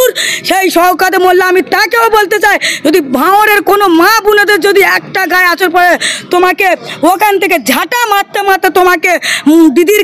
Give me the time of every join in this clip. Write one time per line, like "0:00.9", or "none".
none